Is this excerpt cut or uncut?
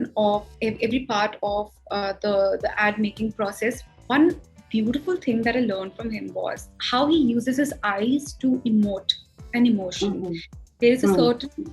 cut